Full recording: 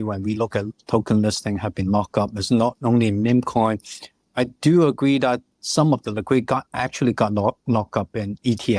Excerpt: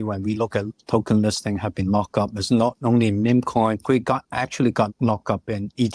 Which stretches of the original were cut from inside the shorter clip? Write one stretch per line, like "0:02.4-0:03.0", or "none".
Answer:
0:03.8-0:06.2
0:07.3-0:07.6